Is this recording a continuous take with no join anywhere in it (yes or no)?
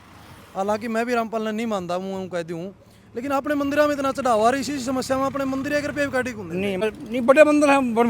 no